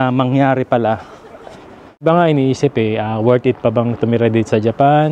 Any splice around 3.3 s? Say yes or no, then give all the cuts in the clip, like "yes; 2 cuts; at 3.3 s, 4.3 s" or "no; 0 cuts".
no; 1 cut; at 1.9 s